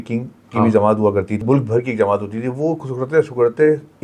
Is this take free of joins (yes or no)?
no